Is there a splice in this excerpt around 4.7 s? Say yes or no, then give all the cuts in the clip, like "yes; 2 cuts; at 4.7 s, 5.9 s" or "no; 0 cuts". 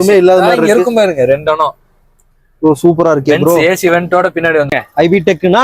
yes; 1 cut; at 4.7 s